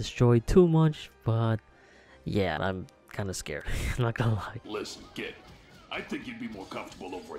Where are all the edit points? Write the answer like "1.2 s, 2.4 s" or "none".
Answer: 2.6 s, 4.6 s